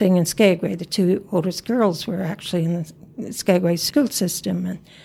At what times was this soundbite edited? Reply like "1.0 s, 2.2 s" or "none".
3.8 s